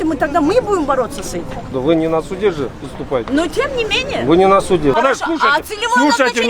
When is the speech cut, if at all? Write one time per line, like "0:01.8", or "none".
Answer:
0:01.8
0:04.9